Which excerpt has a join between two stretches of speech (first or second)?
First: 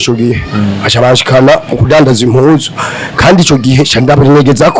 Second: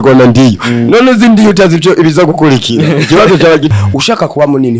second